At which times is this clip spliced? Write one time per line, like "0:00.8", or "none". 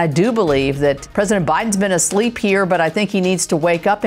0:01.0